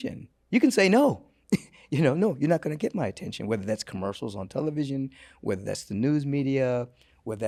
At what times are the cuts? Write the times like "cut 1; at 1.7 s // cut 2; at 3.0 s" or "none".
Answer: none